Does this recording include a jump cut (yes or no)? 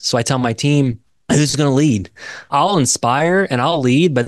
yes